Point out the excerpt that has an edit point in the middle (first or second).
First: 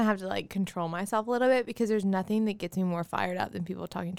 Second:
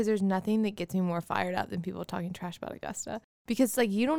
second